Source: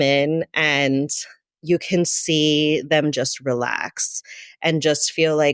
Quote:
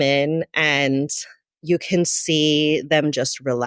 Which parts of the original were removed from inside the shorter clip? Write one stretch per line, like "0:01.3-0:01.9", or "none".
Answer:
none